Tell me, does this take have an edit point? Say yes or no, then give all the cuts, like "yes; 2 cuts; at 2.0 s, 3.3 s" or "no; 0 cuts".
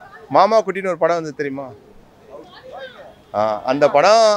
no; 0 cuts